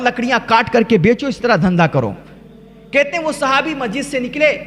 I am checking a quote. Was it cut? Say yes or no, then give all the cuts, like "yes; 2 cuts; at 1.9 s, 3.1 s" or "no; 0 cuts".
no; 0 cuts